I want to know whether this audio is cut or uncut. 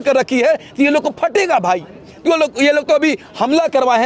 uncut